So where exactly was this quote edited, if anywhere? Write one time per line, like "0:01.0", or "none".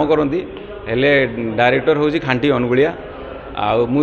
none